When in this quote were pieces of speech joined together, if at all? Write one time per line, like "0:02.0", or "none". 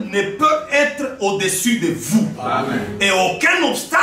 none